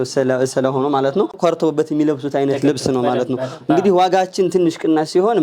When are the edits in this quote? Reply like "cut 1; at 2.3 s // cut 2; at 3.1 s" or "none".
cut 1; at 1.3 s